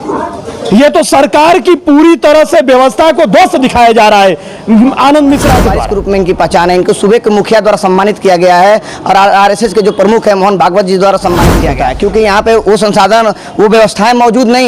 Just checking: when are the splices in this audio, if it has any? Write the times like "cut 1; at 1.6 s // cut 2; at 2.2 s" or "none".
cut 1; at 5.8 s // cut 2; at 11.7 s